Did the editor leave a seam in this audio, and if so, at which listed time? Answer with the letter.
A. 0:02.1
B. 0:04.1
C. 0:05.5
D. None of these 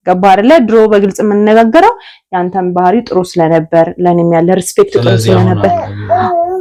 D